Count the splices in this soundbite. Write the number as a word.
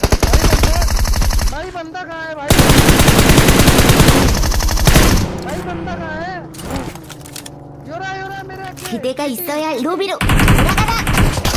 zero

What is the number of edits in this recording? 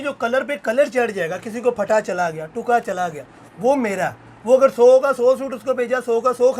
zero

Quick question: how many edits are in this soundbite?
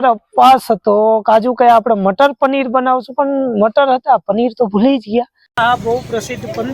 one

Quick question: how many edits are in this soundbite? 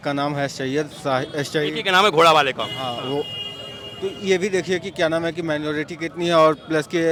zero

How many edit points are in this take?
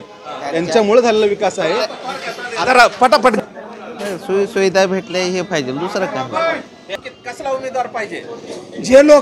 two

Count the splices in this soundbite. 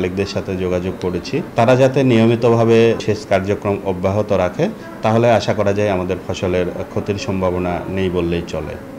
two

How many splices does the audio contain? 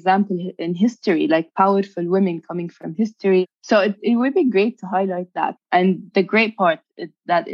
two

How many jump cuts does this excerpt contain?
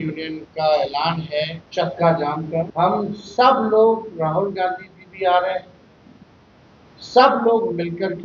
two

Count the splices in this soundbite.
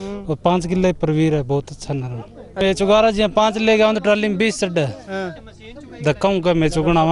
one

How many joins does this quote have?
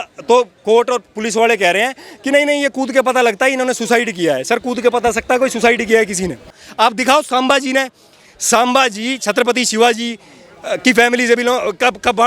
one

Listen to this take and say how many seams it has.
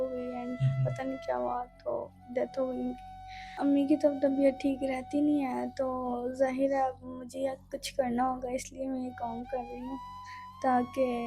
one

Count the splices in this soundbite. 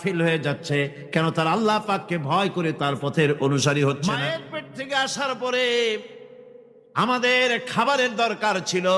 one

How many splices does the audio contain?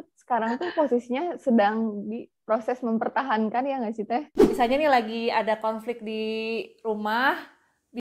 one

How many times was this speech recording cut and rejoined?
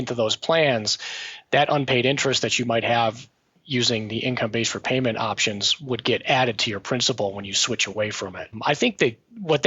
one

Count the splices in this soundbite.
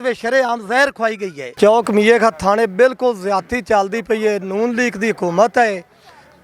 one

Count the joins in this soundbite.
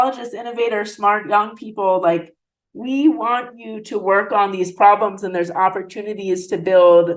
zero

